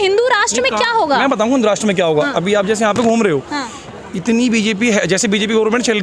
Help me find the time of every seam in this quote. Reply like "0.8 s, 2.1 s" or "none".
none

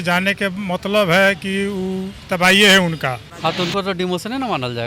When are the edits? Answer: 3.3 s

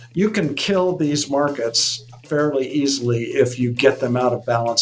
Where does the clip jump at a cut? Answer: none

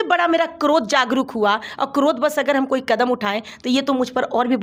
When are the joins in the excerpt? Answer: none

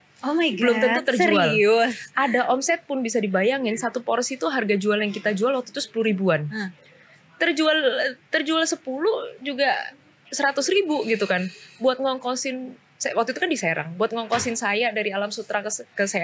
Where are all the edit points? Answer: none

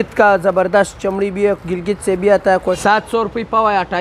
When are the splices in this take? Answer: 2.8 s

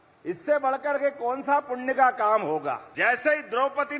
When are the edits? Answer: 2.9 s

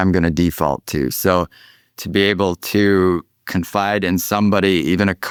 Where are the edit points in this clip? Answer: none

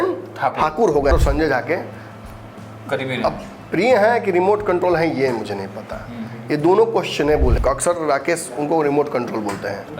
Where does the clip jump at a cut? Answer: 1.1 s, 7.6 s

